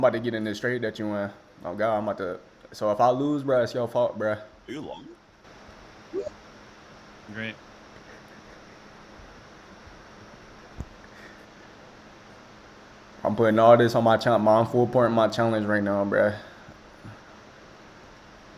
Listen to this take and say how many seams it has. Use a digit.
0